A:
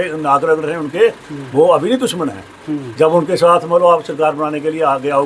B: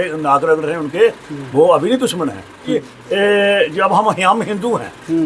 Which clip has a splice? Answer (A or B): B